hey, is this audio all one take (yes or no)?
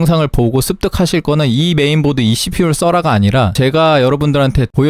no